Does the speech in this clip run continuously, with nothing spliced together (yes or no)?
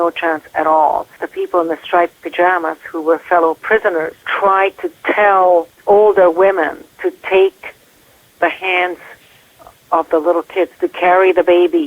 no